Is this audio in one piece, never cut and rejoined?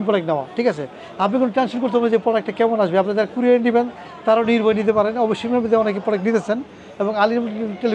yes; 0 cuts

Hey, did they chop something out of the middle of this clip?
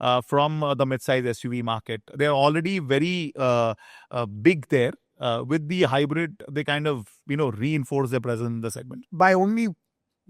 no; 0 cuts

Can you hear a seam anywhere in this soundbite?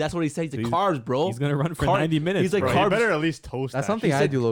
no; 0 cuts

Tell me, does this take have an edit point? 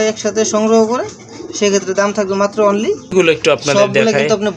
yes; 1 cut; at 3.1 s

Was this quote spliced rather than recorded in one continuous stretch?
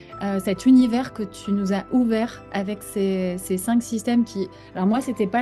no; 0 cuts

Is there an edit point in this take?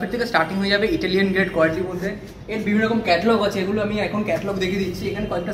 no; 0 cuts

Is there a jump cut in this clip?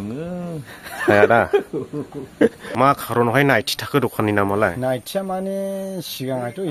yes; 1 cut; at 2.6 s

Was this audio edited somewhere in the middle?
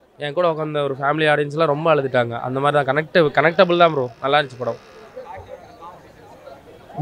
no; 0 cuts

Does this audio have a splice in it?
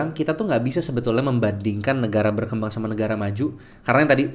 no; 0 cuts

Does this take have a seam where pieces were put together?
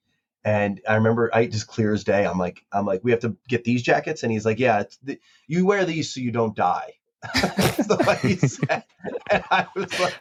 no; 0 cuts

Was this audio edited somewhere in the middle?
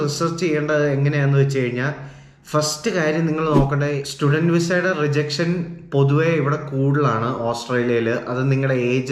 yes; 1 cut; at 4.1 s

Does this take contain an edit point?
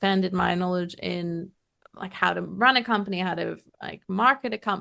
no; 0 cuts

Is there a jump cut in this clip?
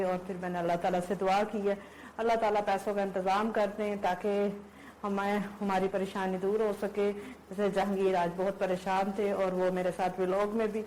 no; 0 cuts

